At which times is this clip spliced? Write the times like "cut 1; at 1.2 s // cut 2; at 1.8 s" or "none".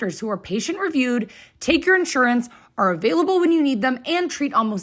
none